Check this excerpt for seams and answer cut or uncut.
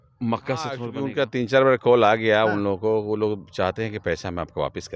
cut